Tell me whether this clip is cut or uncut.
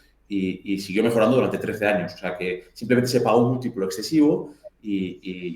uncut